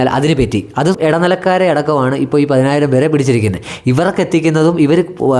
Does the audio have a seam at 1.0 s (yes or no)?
yes